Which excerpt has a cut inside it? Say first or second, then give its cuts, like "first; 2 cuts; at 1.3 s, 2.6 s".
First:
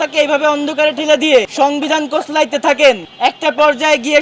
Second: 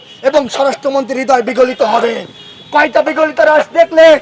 first; 2 cuts; at 1.5 s, 3.1 s